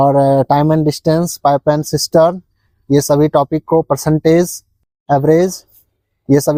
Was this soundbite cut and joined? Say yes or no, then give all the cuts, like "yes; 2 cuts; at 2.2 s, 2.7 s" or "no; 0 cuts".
no; 0 cuts